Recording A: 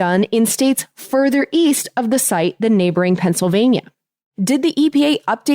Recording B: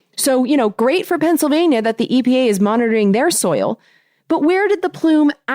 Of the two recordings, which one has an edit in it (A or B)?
A